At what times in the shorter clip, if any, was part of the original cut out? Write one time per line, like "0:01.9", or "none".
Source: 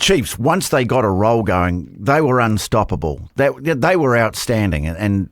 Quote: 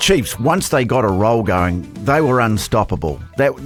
none